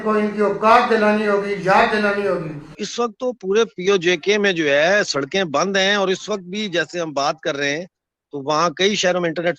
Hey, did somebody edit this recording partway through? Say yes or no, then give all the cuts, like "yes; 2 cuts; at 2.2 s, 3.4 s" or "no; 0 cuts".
yes; 1 cut; at 2.8 s